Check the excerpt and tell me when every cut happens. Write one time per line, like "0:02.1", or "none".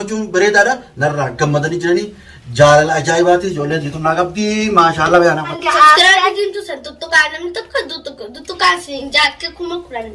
0:05.5